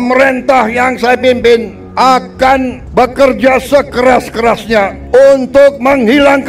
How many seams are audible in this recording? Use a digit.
3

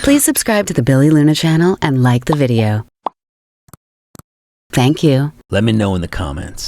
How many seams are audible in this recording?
2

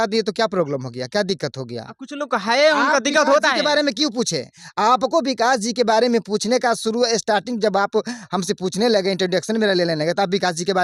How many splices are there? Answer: 0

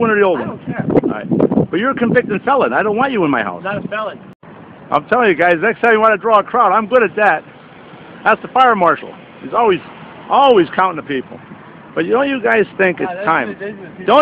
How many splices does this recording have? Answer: 1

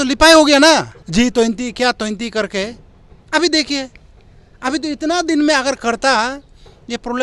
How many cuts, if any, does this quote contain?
1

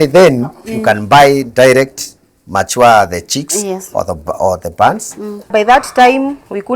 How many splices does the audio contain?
1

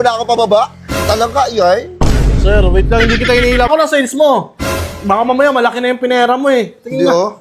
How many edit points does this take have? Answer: 1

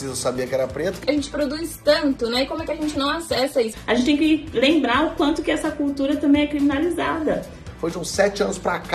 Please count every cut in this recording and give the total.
3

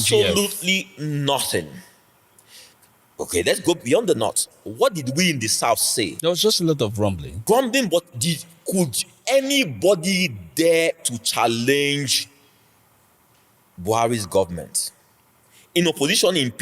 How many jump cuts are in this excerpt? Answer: 2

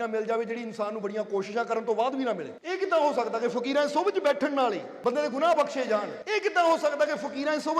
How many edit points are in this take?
3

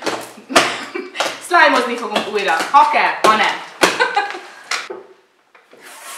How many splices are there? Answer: 1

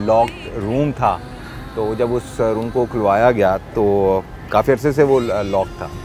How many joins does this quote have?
0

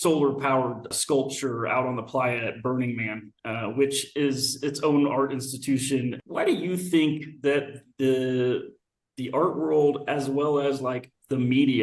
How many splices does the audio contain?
2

